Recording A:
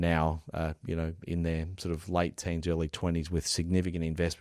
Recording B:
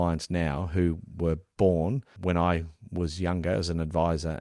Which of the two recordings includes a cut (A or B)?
B